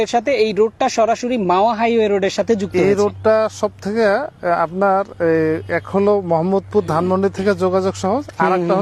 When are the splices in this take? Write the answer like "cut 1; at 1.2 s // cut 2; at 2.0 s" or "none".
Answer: none